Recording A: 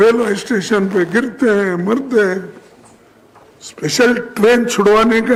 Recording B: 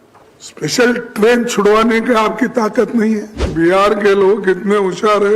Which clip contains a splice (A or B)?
B